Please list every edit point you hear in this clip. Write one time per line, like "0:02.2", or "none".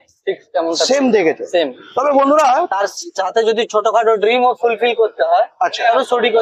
0:02.7